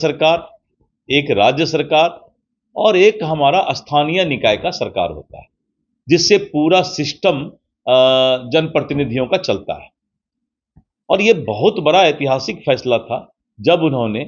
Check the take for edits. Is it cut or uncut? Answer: uncut